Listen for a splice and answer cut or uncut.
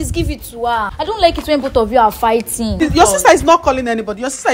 cut